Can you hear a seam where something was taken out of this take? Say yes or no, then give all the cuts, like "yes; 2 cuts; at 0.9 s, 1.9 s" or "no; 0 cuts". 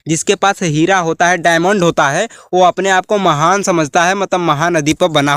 no; 0 cuts